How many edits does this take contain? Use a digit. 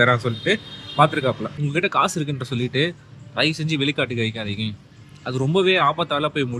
1